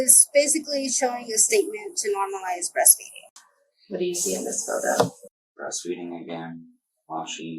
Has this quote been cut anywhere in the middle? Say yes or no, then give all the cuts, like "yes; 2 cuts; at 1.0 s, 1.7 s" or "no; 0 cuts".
yes; 1 cut; at 3.3 s